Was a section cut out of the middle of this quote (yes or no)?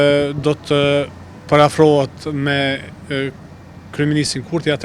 no